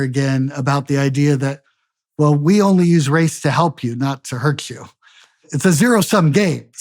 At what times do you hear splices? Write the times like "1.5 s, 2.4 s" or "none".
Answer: 5.5 s